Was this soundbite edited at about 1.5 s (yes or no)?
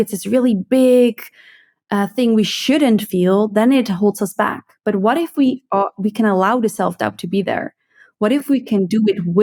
no